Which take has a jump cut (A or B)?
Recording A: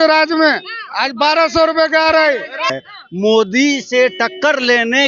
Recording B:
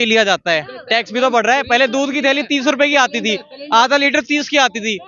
A